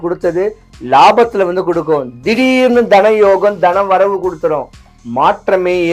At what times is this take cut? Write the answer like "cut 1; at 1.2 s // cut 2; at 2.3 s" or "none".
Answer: none